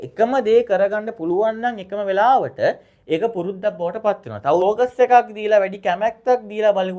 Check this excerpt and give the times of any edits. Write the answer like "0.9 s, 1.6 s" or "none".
4.6 s